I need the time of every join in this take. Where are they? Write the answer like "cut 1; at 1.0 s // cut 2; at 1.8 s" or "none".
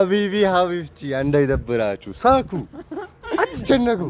none